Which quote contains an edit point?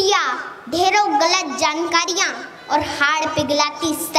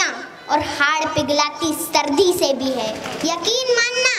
second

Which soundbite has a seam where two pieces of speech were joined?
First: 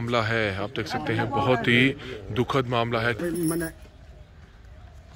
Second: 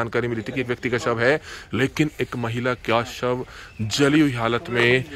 first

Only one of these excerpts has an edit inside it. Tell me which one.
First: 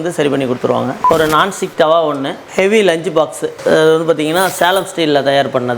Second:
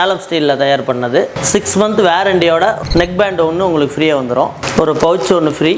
first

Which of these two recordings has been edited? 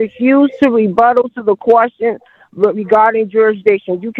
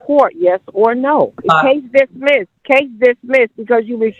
second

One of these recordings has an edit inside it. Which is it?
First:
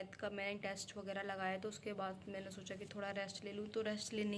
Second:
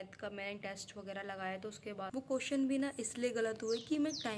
second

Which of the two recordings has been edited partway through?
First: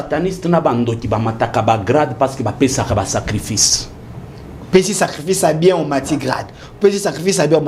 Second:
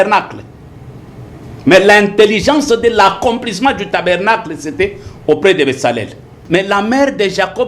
second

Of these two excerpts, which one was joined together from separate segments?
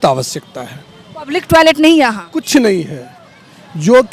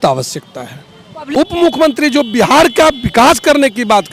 second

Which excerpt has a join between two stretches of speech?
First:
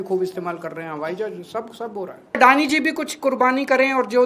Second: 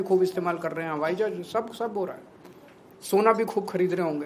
first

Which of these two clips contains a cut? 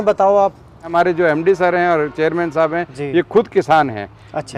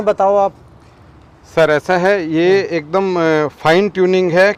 first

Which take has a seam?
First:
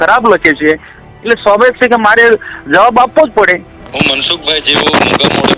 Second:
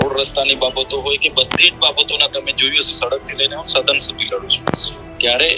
first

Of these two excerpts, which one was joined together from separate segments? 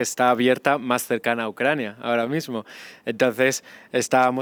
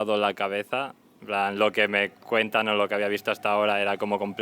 second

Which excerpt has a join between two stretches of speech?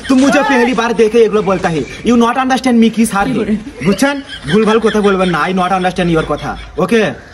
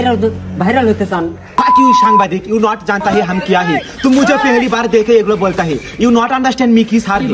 second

